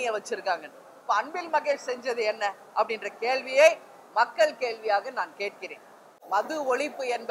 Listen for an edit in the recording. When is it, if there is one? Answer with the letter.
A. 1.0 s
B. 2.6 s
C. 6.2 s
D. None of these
C